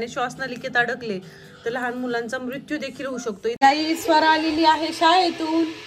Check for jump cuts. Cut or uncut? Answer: cut